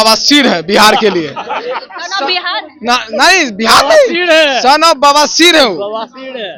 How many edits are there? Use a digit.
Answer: 0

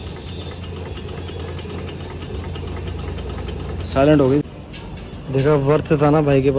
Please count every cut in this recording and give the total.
1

